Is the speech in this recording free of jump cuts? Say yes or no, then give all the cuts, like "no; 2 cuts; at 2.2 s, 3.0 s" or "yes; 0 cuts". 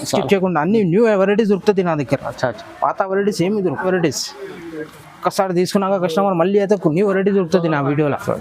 no; 1 cut; at 3.8 s